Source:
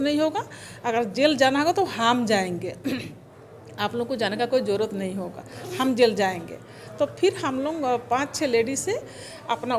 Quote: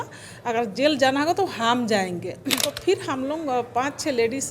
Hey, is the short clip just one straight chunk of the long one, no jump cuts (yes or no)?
no